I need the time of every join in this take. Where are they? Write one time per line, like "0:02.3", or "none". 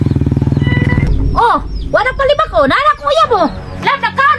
0:01.1